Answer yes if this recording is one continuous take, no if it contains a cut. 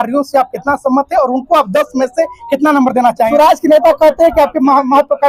no